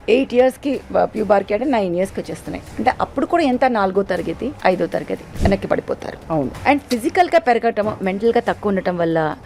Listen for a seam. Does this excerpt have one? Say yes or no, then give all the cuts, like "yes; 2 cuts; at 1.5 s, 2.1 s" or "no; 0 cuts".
yes; 3 cuts; at 4.6 s, 5.2 s, 6.5 s